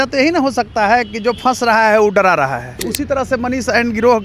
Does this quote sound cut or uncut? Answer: cut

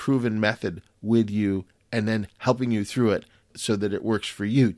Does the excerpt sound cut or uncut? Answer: cut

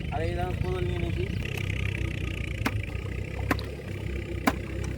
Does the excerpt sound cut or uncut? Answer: cut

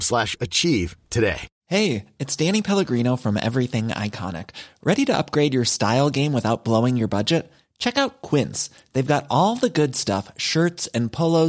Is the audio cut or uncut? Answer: cut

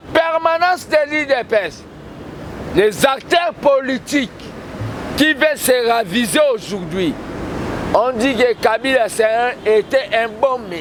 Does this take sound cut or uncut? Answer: uncut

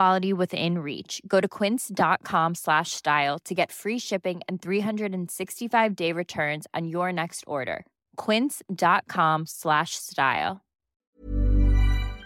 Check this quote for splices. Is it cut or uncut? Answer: cut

